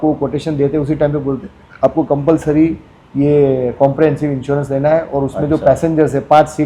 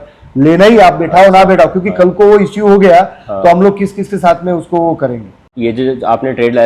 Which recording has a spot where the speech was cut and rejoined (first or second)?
second